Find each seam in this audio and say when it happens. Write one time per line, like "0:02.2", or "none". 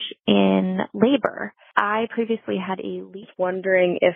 0:01.6
0:03.2